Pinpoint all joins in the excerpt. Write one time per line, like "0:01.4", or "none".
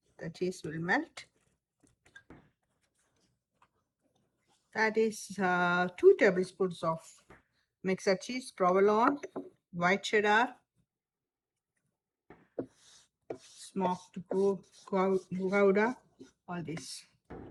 none